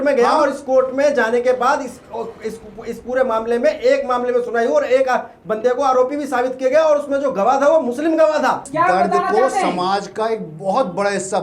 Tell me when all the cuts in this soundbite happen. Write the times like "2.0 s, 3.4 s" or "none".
8.6 s